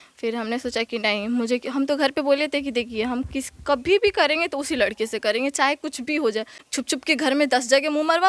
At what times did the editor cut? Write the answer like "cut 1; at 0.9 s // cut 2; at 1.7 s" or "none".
cut 1; at 6.6 s